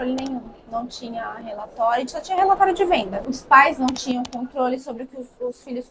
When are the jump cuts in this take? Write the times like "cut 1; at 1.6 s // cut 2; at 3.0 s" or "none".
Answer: cut 1; at 3.2 s